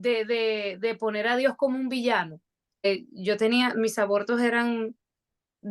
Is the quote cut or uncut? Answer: cut